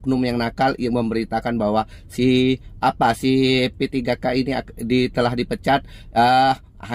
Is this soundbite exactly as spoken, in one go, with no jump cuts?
yes; 0 cuts

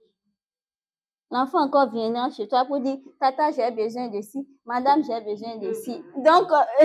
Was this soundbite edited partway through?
no; 0 cuts

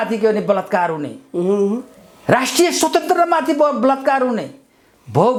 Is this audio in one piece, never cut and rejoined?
yes; 0 cuts

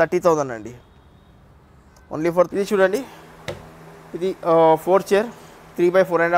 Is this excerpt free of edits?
no; 1 cut; at 2.5 s

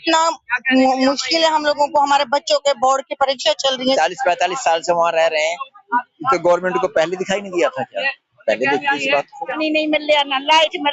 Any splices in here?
yes; 2 cuts; at 3.8 s, 9.5 s

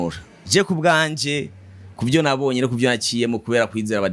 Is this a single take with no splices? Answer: yes; 0 cuts

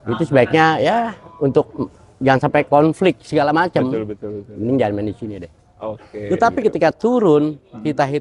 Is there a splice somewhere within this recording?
yes; 1 cut; at 6.1 s

